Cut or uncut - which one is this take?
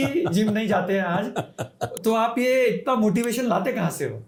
uncut